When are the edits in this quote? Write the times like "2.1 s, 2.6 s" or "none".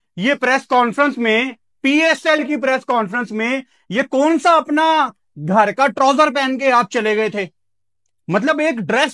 none